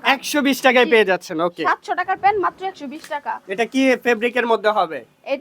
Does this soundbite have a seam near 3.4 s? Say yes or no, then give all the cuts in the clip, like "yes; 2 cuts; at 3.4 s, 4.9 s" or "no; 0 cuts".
yes; 1 cut; at 3.4 s